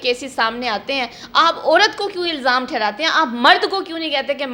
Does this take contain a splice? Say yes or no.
no